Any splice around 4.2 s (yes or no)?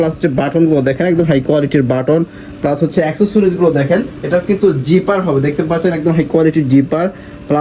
yes